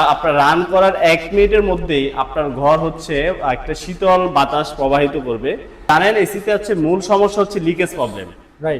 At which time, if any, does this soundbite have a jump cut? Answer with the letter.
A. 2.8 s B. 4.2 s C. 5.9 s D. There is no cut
C